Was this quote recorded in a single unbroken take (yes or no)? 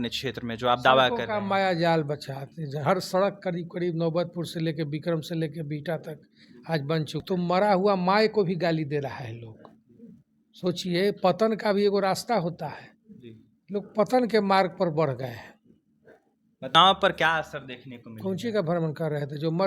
no